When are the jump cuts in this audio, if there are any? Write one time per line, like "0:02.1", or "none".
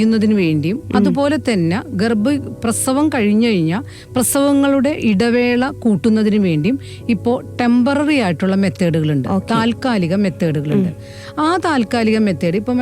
none